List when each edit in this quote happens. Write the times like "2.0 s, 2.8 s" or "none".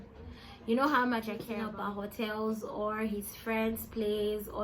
1.6 s